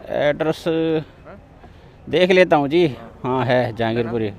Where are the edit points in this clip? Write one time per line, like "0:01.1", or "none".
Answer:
none

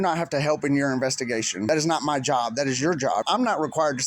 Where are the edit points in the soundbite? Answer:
0:01.7
0:03.2

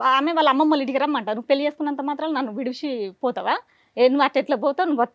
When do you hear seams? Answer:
none

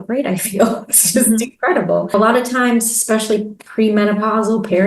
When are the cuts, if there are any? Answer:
0:02.1

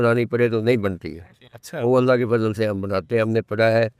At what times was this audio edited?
none

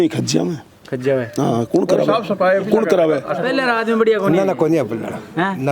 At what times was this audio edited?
0:03.4

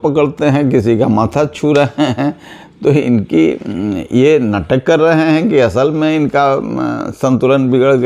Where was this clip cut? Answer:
none

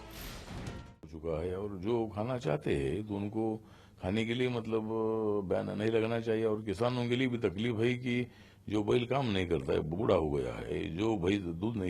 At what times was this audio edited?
0:01.0

